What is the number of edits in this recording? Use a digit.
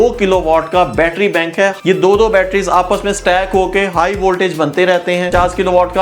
2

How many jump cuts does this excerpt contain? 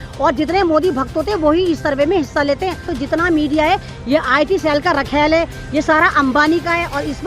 1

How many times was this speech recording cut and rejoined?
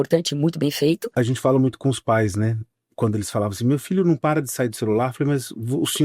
1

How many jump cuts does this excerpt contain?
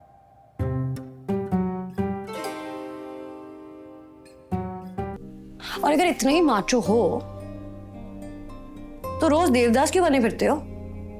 1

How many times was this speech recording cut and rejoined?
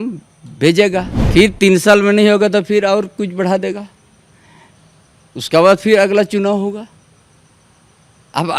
1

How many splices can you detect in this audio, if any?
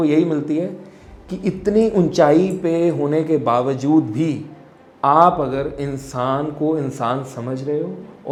0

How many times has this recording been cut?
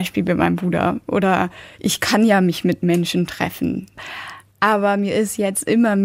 2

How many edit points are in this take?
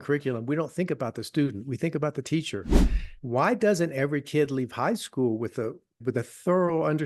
2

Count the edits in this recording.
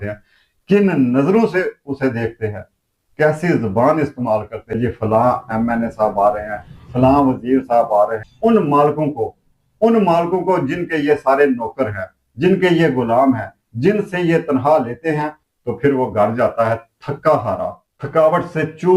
3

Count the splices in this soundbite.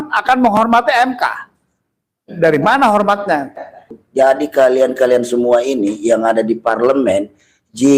1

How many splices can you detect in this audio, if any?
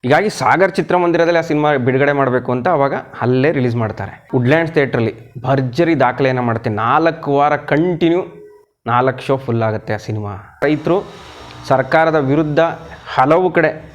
2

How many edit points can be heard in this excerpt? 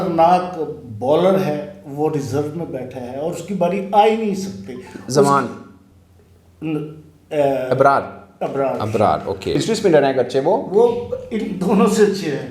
1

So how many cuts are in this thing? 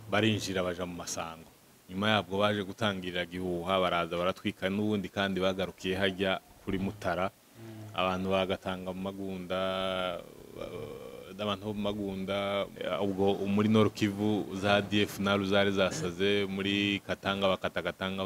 1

